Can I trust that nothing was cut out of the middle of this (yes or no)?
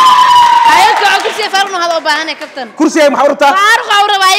yes